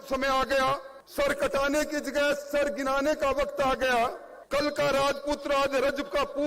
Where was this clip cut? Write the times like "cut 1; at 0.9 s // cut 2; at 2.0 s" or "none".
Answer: cut 1; at 1.0 s // cut 2; at 4.3 s